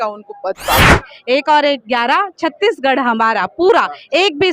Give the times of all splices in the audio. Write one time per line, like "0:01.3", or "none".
0:01.0